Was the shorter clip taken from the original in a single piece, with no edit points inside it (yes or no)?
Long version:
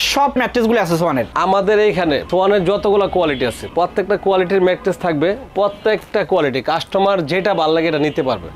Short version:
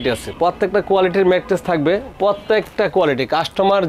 yes